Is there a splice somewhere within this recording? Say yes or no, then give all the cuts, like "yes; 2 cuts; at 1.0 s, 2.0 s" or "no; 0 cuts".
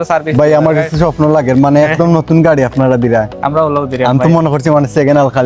no; 0 cuts